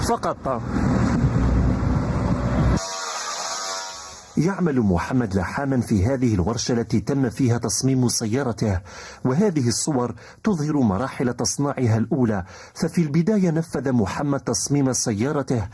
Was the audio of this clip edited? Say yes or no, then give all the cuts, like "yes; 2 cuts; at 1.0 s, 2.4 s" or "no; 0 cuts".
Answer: no; 0 cuts